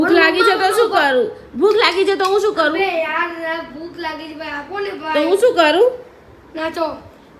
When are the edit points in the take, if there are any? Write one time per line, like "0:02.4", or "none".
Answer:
none